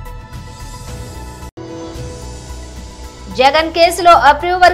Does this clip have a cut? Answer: yes; 2 cuts; at 1.5 s, 3.3 s

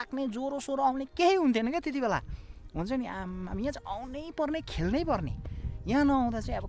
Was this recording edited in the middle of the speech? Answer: no; 0 cuts

